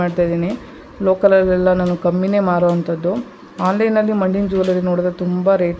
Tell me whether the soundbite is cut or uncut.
uncut